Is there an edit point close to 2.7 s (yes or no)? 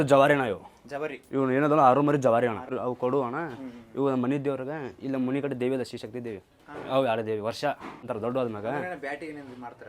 yes